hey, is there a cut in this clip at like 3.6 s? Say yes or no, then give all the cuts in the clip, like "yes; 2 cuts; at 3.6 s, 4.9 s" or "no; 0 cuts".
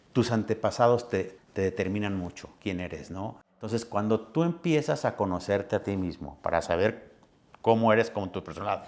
yes; 2 cuts; at 1.3 s, 3.6 s